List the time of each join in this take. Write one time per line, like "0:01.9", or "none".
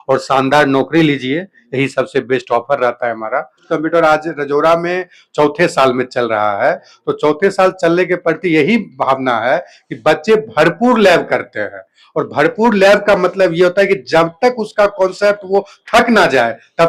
0:03.7